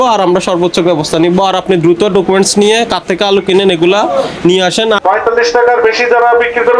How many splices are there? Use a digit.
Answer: 1